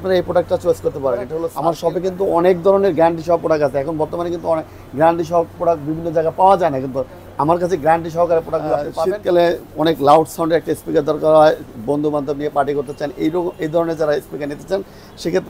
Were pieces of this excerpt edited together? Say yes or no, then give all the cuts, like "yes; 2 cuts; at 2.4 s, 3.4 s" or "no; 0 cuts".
yes; 2 cuts; at 1.4 s, 9.0 s